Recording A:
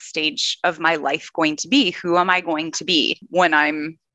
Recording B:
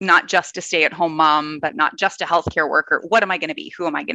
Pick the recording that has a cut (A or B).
A